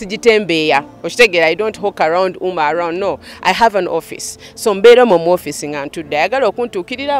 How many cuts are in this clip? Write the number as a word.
zero